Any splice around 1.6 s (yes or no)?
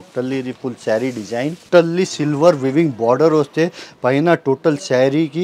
yes